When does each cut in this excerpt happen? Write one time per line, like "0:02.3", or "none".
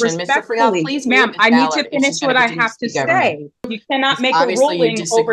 0:03.7